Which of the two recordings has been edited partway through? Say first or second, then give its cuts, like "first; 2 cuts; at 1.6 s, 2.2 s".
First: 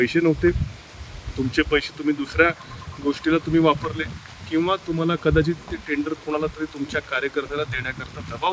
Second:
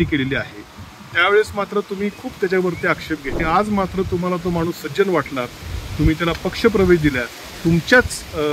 second; 1 cut; at 3.4 s